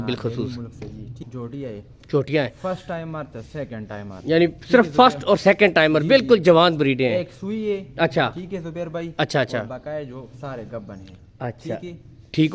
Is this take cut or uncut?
cut